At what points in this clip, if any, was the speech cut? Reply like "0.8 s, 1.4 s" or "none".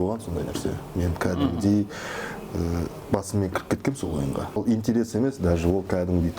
4.6 s